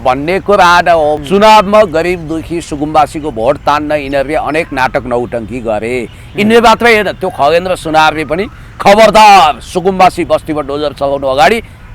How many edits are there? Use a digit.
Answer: 1